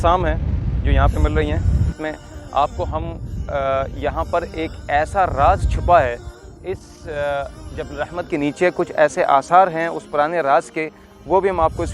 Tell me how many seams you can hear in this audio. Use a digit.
1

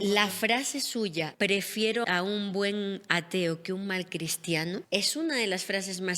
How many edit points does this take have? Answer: 3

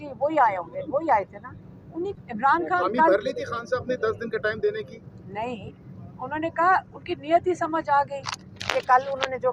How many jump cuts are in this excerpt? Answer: 1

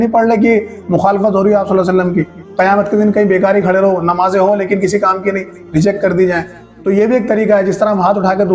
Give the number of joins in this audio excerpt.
1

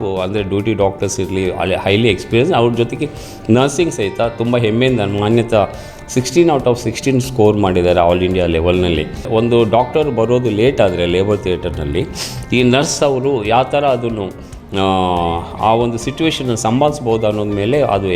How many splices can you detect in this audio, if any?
1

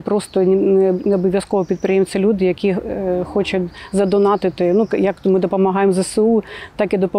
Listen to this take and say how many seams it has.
0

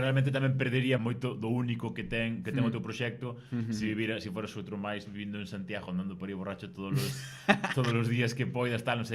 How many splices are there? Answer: 1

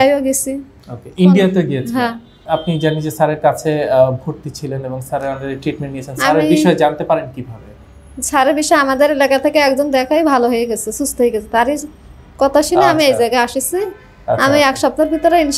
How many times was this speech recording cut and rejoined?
1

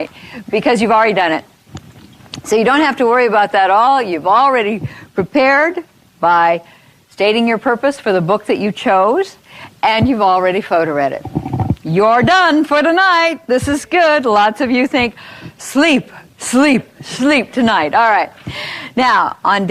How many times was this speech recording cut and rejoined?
1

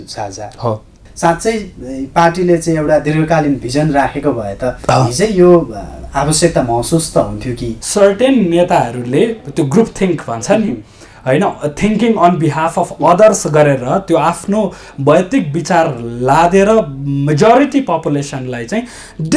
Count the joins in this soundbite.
2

